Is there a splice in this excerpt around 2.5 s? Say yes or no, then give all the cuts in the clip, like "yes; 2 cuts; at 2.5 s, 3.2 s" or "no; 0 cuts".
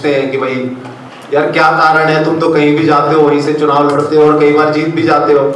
no; 0 cuts